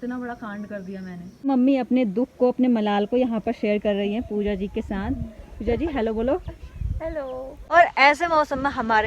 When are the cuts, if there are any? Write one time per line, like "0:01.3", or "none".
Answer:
0:01.5
0:07.6